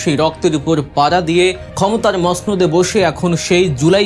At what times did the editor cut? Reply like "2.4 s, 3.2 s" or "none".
1.6 s